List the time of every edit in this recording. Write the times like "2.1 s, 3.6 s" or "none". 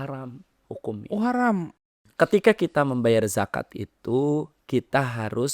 1.8 s